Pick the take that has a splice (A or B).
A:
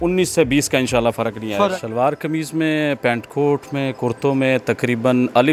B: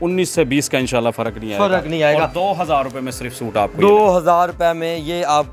A